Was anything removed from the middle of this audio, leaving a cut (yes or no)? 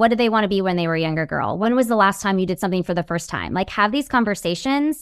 yes